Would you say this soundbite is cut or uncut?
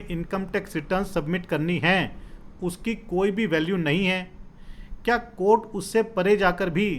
uncut